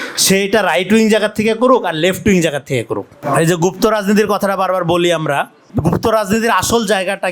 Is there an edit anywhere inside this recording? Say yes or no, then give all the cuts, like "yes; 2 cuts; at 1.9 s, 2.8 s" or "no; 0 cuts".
yes; 1 cut; at 3.1 s